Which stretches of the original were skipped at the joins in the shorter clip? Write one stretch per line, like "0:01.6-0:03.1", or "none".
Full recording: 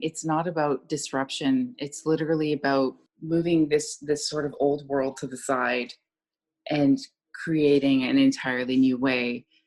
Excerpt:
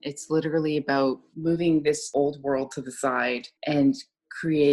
0:03.0-0:03.1
0:03.9-0:04.5
0:06.0-0:06.5